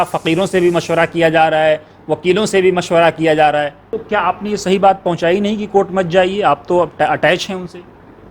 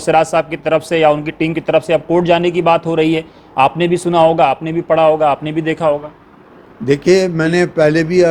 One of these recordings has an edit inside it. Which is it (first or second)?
first